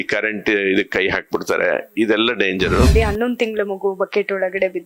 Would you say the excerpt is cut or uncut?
cut